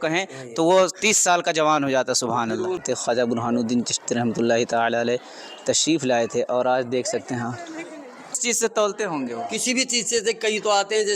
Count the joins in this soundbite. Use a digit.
2